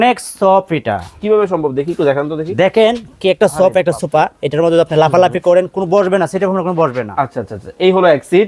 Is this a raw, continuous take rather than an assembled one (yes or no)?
yes